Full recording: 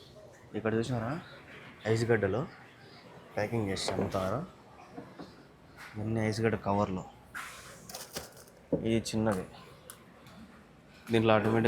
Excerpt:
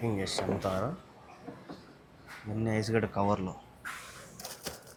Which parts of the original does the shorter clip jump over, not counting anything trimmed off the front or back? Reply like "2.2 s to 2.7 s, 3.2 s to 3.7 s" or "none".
none